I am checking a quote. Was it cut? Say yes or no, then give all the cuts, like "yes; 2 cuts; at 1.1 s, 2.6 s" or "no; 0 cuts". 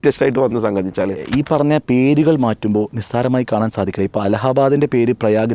yes; 1 cut; at 1.2 s